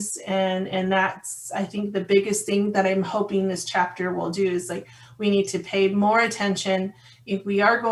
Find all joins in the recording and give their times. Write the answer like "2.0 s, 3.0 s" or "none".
none